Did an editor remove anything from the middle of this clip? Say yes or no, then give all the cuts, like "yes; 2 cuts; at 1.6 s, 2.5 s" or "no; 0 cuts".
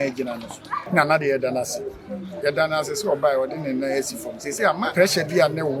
yes; 2 cuts; at 0.8 s, 4.9 s